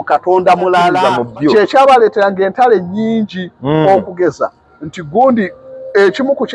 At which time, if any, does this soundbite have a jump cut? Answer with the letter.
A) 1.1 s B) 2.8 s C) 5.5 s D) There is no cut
A